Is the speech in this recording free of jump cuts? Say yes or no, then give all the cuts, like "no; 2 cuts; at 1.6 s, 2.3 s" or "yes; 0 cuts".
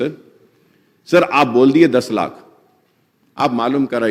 yes; 0 cuts